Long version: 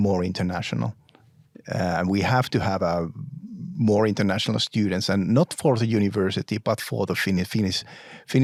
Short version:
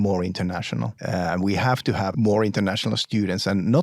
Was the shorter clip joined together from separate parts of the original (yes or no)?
yes